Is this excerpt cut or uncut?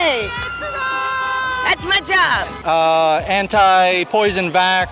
cut